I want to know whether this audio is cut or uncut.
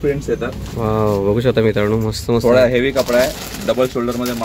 uncut